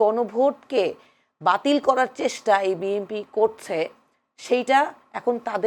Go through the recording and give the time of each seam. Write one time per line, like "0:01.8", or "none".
none